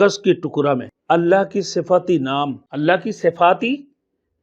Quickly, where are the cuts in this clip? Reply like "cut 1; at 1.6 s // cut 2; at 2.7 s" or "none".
cut 1; at 0.9 s // cut 2; at 2.6 s